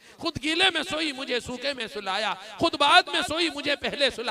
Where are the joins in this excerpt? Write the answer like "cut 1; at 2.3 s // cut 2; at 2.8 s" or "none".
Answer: none